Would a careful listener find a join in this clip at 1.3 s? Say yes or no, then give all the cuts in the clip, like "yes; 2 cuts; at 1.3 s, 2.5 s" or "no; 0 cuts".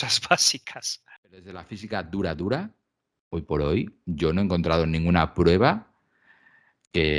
yes; 1 cut; at 1.3 s